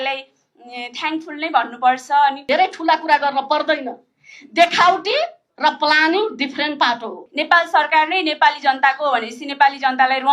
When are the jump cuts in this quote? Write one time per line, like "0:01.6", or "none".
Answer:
0:02.4
0:07.2